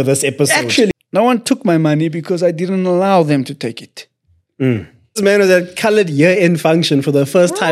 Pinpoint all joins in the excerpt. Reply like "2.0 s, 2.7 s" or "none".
1.0 s, 5.2 s

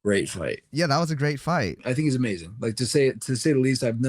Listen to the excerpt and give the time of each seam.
1.8 s

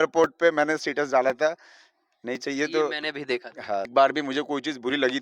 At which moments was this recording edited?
3.9 s

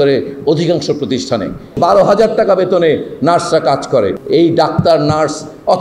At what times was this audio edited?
1.8 s, 4.2 s

